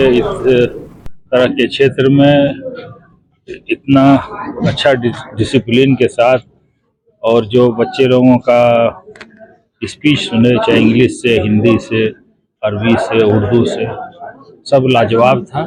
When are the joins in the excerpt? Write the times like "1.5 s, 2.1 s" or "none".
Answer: none